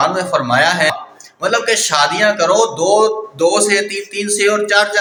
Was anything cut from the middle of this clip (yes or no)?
no